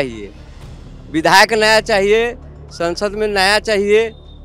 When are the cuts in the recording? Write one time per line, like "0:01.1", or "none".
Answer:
none